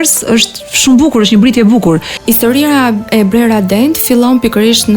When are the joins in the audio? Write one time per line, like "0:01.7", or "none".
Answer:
0:02.1